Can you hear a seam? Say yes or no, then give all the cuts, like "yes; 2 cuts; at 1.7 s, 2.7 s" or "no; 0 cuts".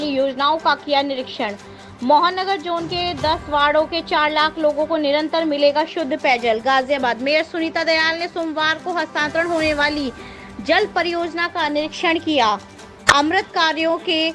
no; 0 cuts